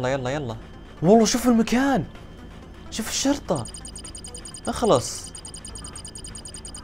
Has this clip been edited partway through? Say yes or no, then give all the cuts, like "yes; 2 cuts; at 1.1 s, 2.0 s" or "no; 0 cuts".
no; 0 cuts